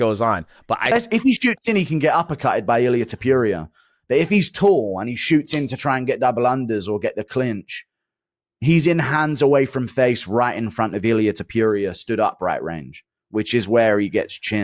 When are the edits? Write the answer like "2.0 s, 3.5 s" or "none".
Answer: 0.9 s